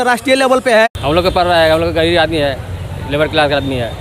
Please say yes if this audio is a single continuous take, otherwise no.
no